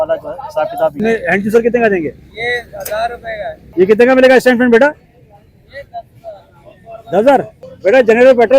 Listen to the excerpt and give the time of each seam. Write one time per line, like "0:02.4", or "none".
0:01.0
0:03.6
0:07.6